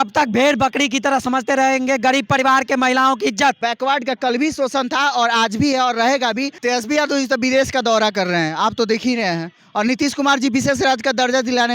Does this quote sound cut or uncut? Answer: cut